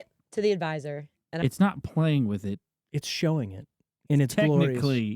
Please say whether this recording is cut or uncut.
cut